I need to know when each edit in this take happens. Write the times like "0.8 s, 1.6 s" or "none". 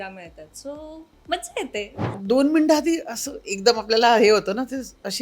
2.1 s